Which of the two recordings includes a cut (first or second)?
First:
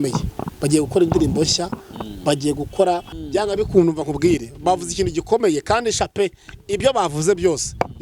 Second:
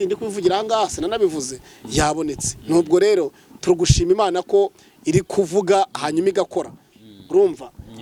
first